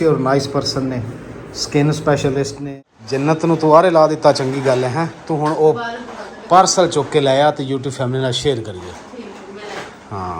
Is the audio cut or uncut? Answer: cut